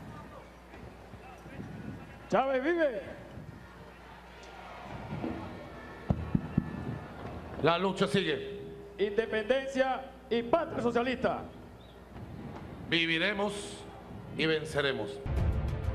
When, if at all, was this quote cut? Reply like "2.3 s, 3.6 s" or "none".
1.5 s